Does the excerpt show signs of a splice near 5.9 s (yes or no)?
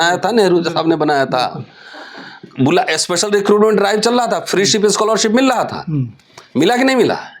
no